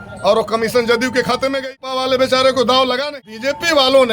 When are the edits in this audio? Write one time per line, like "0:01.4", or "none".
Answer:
0:01.8
0:03.1